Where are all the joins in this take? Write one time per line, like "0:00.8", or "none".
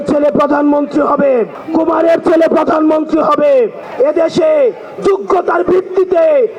0:01.6
0:03.8